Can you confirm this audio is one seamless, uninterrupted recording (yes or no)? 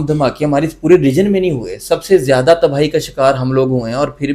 yes